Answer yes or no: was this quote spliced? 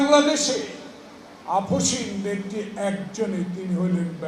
no